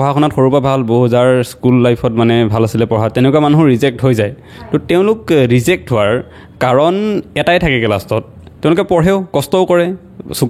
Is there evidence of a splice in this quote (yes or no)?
no